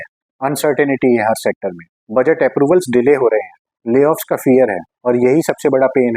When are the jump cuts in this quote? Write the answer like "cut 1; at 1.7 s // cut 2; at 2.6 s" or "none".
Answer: cut 1; at 4.9 s